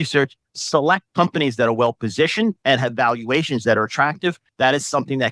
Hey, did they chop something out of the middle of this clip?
yes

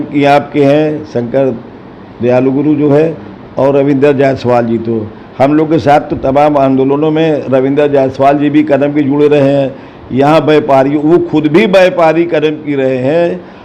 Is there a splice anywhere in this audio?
no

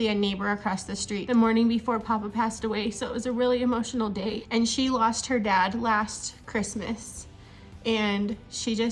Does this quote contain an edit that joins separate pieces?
yes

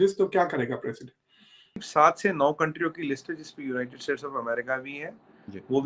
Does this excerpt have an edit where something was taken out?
yes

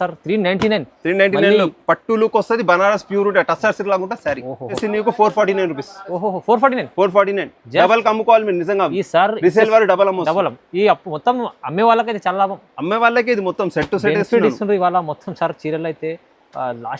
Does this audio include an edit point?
yes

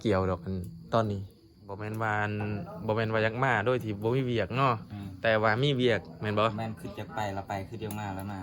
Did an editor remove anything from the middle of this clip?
yes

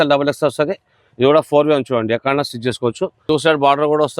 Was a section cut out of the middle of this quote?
yes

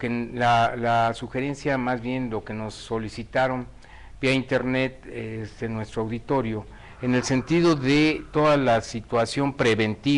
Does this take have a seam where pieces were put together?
yes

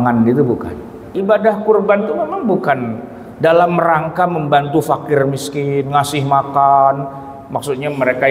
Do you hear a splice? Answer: yes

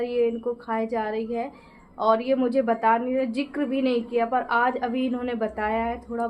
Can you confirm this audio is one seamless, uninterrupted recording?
yes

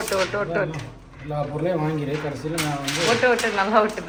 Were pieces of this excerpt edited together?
no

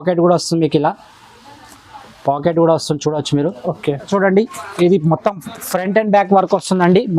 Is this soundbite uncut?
no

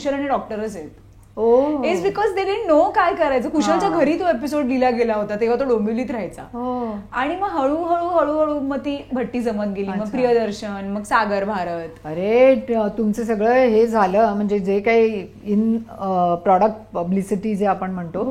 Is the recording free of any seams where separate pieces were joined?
yes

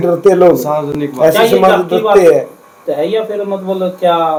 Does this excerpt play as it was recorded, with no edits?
yes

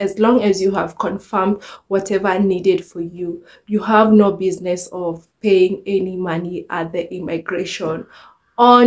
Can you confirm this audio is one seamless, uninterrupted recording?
yes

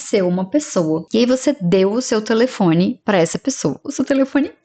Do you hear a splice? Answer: no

